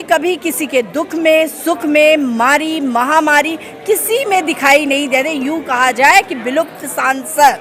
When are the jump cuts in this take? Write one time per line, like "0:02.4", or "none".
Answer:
none